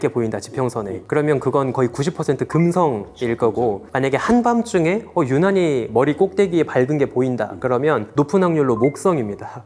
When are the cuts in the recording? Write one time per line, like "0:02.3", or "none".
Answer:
none

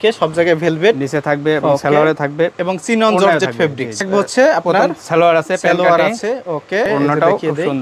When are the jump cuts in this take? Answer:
0:04.0
0:06.9

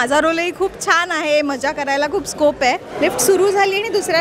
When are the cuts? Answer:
0:02.9

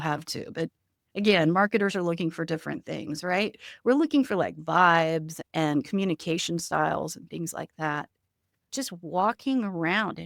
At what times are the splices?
0:05.3
0:08.7

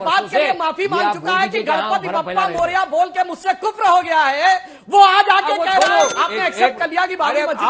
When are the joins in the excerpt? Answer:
0:06.2

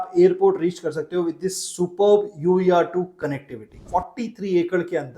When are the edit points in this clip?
0:03.8

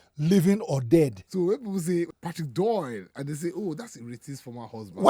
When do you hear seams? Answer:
0:01.2
0:02.1

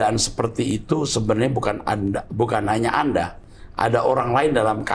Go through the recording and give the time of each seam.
none

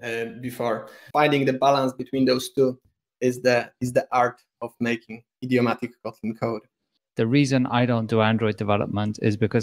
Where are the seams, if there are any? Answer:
0:01.0
0:07.0

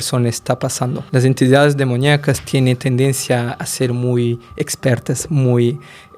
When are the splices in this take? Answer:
0:00.9

